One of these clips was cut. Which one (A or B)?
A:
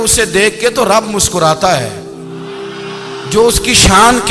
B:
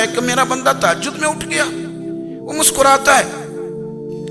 B